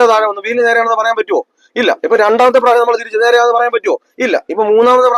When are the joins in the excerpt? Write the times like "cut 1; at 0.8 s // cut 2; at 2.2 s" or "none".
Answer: none